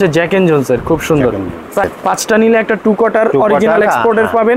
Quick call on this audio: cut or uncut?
cut